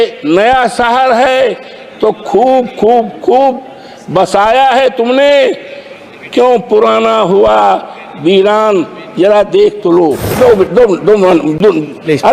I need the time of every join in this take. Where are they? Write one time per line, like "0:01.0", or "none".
0:10.3